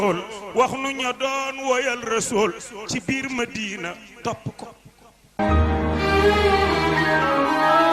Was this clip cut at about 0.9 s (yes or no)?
no